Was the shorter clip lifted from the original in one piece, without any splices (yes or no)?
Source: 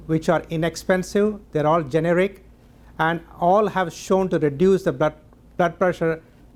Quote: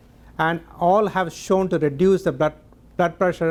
yes